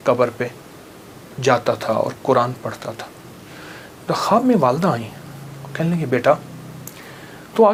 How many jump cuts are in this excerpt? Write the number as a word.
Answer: zero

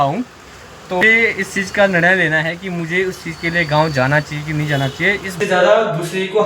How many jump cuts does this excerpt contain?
two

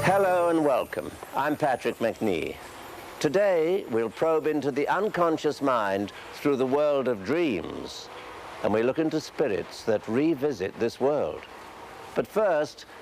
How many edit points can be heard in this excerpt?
one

